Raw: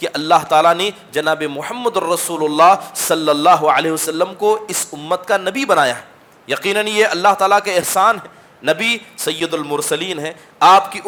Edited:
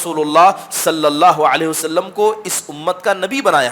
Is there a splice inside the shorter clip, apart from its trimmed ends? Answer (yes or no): no